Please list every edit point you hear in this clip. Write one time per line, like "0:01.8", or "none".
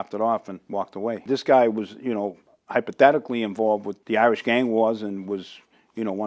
0:01.2
0:03.9